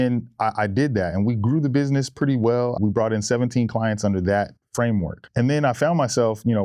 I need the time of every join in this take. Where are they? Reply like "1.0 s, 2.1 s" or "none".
2.8 s, 4.9 s